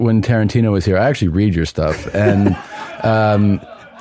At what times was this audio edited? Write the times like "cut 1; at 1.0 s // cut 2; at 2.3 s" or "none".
none